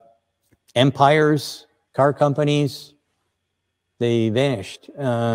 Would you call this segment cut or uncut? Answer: uncut